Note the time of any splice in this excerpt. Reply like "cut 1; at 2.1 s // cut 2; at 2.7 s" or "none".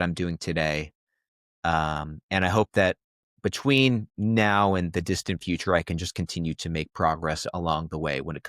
none